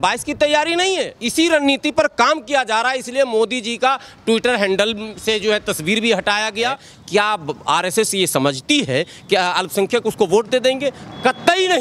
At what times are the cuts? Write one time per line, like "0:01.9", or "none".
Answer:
0:01.2
0:06.9